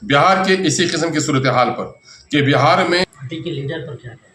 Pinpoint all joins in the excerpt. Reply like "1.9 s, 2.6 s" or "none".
3.0 s